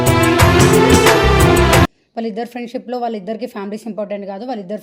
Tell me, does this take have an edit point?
yes; 1 cut; at 2.0 s

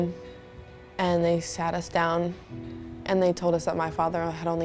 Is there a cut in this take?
no; 0 cuts

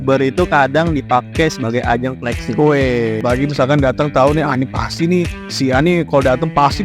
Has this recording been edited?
yes; 1 cut; at 3.2 s

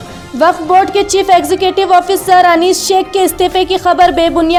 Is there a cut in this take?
no; 0 cuts

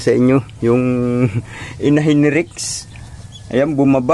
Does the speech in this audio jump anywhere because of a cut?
no; 0 cuts

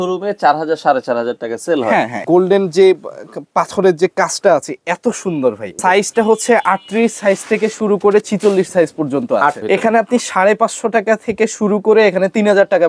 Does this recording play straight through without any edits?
no; 3 cuts; at 2.2 s, 5.8 s, 9.6 s

